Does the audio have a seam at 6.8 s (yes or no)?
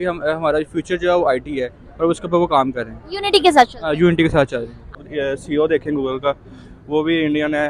no